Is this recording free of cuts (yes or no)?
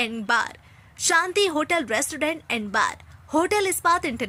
yes